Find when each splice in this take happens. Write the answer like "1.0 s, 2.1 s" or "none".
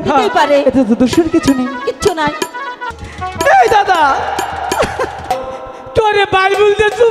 2.8 s, 5.2 s

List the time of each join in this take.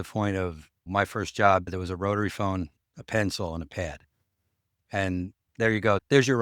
1.7 s, 5.5 s

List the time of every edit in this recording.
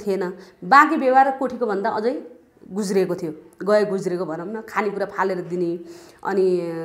none

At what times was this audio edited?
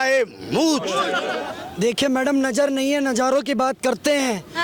1.4 s

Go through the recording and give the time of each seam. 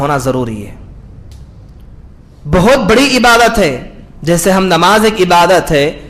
none

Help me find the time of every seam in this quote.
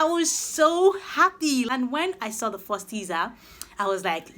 1.7 s

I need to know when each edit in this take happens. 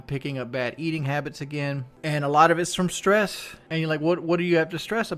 none

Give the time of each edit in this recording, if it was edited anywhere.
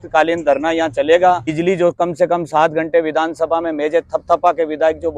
1.5 s

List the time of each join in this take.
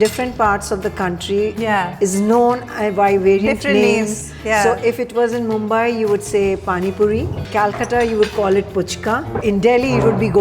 7.4 s, 9.4 s

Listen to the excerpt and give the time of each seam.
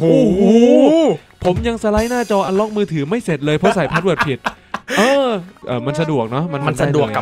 5.5 s

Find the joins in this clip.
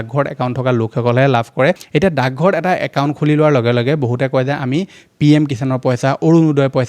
1.8 s

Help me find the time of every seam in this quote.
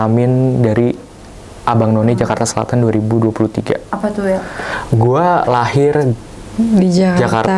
4.8 s

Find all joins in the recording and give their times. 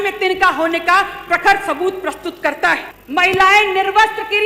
2.9 s

